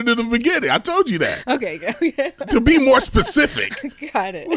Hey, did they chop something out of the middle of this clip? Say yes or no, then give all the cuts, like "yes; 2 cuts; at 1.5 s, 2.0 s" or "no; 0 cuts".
no; 0 cuts